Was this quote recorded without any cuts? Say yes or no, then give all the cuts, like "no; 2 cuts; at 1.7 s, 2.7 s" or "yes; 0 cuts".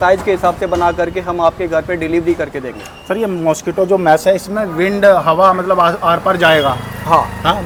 yes; 0 cuts